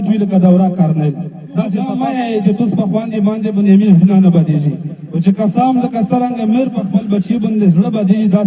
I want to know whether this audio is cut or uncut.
cut